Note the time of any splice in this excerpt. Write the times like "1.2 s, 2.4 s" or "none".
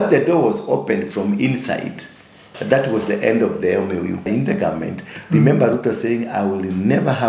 4.3 s